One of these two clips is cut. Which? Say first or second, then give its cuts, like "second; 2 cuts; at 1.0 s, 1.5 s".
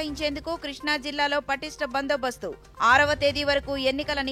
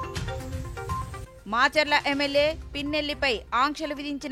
second; 1 cut; at 1.2 s